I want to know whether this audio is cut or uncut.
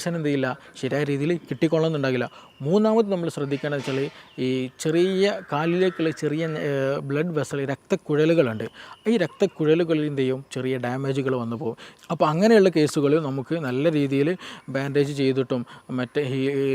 cut